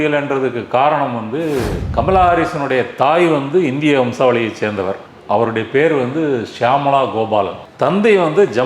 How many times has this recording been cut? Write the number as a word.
one